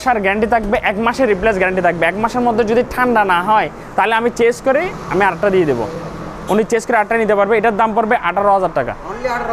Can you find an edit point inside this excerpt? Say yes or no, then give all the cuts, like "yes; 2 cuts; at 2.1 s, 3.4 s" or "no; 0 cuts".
no; 0 cuts